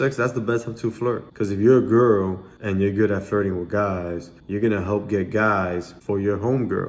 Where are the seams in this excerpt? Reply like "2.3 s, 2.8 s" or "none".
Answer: 1.3 s